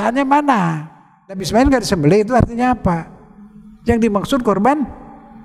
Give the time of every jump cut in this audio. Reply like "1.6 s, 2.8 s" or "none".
1.4 s